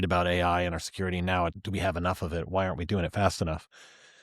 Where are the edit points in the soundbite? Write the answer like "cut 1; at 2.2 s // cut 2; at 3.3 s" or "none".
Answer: cut 1; at 1.6 s